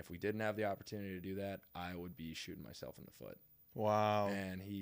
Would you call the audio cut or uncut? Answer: uncut